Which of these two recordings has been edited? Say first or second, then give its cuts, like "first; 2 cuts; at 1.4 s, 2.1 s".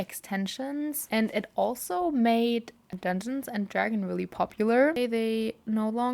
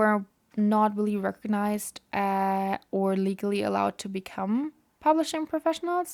first; 3 cuts; at 1.0 s, 2.9 s, 5.0 s